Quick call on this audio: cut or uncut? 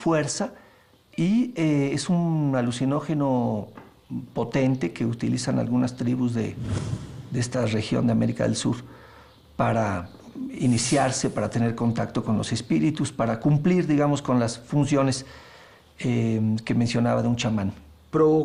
uncut